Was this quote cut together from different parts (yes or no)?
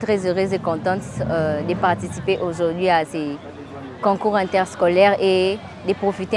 no